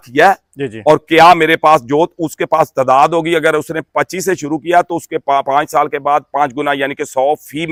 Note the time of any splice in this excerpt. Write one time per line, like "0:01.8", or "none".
none

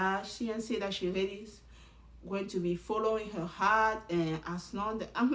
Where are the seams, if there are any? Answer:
none

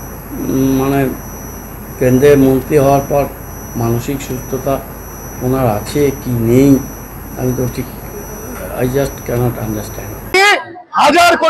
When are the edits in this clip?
0:10.3

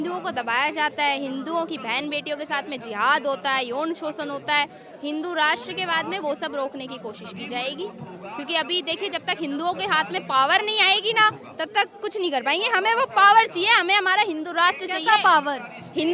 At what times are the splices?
none

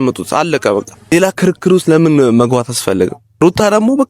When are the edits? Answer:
0:01.1
0:03.2

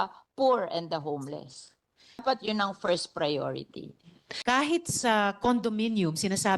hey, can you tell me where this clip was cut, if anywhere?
0:02.2
0:04.3

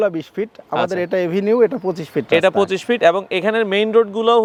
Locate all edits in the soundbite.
none

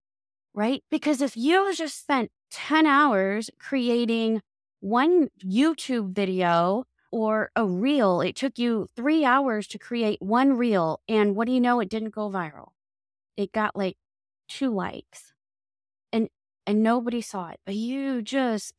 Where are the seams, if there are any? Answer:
0:02.4

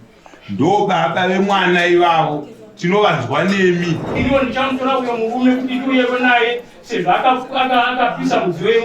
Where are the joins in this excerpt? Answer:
0:04.1

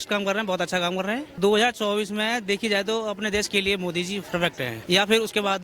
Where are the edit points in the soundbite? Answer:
0:01.4
0:04.8

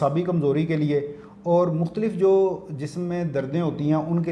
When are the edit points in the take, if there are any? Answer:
none

